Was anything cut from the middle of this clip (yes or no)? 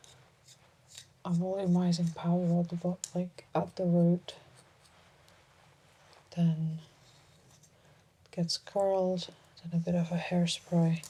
no